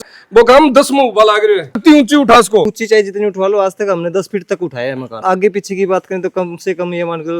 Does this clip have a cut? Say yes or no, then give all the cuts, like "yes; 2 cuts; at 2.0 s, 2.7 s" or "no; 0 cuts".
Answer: yes; 3 cuts; at 1.8 s, 2.8 s, 5.2 s